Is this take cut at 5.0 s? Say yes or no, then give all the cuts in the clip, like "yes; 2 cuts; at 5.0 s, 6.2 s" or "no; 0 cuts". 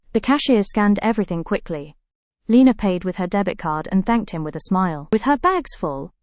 yes; 1 cut; at 5.0 s